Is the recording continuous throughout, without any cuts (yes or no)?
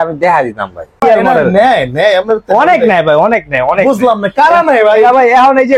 no